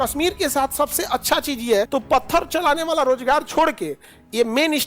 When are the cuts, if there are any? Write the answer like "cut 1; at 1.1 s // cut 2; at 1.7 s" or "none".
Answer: cut 1; at 1.9 s

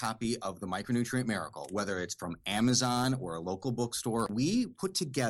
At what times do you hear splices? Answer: cut 1; at 4.3 s

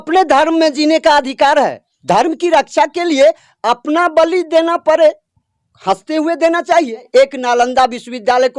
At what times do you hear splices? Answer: cut 1; at 1.9 s // cut 2; at 7.0 s

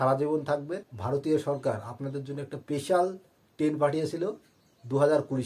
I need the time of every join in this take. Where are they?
cut 1; at 0.9 s // cut 2; at 2.5 s

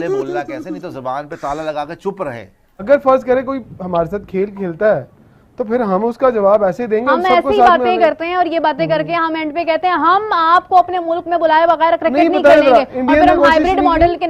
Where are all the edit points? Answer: cut 1; at 2.8 s

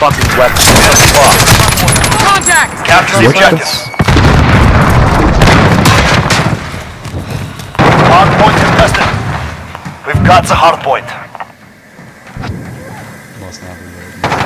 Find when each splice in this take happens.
none

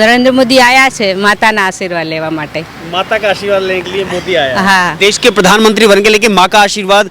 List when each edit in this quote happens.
cut 1; at 4.9 s

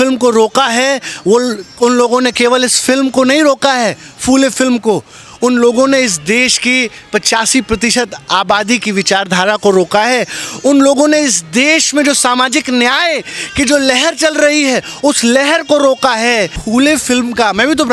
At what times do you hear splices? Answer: cut 1; at 16.6 s

